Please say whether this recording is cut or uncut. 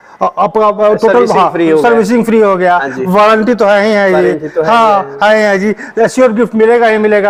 uncut